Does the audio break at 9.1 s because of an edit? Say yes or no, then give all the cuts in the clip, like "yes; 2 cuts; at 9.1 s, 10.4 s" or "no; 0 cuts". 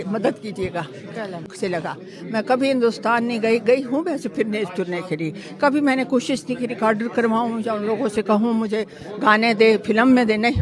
no; 1 cut; at 1.5 s